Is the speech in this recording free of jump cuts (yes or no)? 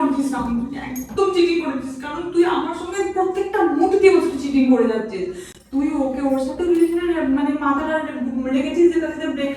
yes